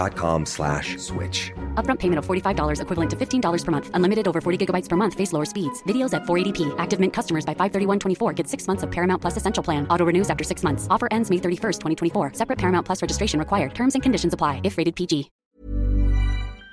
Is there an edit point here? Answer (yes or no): yes